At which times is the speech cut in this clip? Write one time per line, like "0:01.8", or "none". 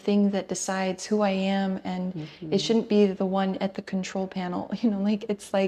none